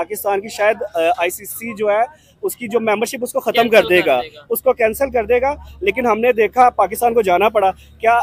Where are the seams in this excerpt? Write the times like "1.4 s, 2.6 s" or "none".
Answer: none